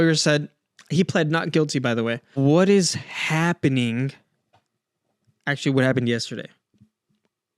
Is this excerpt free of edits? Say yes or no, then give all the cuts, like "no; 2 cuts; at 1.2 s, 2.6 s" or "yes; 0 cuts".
no; 1 cut; at 2.3 s